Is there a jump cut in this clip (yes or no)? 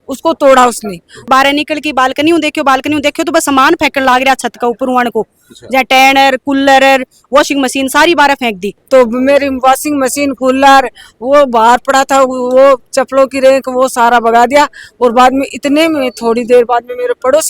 yes